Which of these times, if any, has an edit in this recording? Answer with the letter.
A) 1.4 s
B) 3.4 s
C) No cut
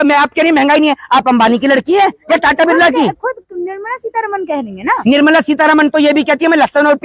C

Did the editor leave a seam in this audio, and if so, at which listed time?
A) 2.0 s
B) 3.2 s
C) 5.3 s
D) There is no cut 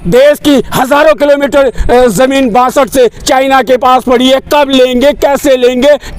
D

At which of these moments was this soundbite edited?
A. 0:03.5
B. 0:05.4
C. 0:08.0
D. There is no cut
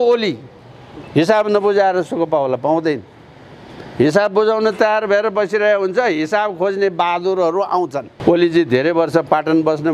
C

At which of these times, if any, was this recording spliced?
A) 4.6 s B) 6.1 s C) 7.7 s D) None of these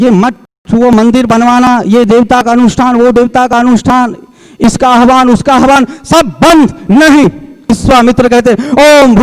C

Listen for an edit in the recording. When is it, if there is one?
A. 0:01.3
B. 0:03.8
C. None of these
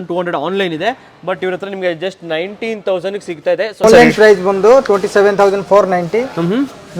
B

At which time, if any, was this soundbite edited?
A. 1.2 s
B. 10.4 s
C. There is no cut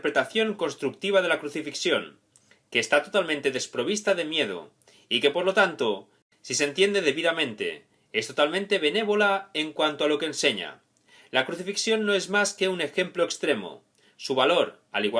C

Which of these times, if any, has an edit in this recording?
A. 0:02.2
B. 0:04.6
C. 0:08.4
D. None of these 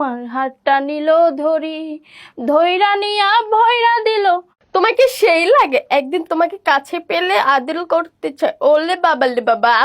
B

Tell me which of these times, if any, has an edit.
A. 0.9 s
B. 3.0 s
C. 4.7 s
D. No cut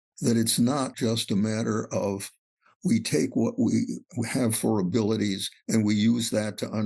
A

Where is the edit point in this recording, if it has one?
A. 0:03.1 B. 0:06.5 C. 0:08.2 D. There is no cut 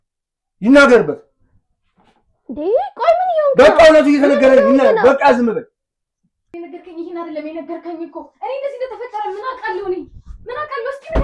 B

